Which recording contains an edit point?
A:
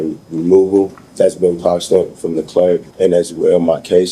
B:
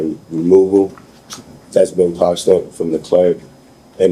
A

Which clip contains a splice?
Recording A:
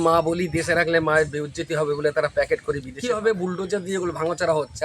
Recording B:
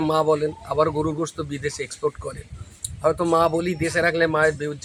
A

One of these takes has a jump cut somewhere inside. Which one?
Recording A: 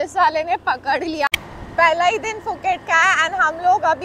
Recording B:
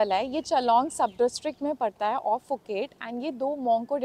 A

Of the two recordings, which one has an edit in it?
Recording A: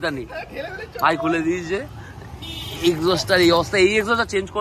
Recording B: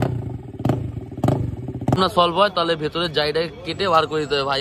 B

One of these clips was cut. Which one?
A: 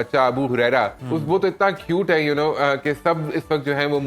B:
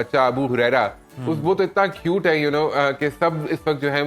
A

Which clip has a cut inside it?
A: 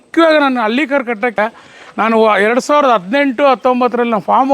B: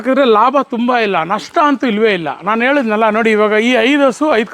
A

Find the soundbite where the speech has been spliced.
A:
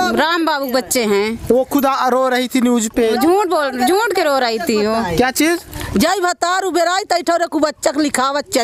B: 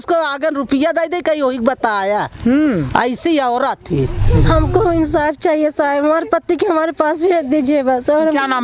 B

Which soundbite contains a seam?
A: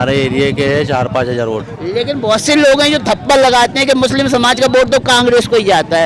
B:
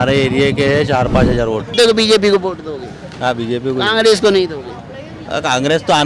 B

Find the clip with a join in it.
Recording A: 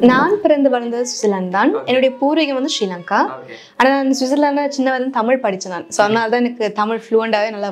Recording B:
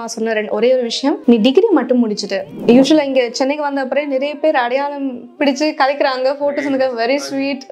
B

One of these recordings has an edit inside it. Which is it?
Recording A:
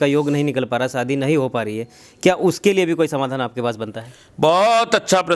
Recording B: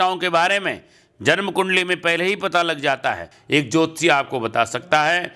B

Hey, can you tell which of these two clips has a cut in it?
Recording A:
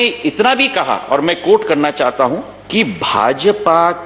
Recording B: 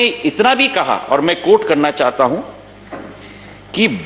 A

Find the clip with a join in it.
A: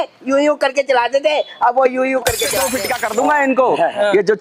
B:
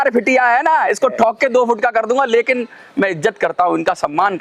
A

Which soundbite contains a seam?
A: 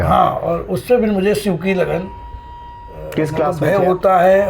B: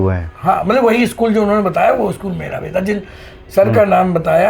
A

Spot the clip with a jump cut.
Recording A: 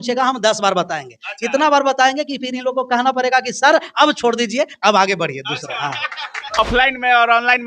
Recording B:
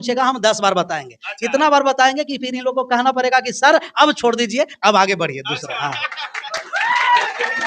A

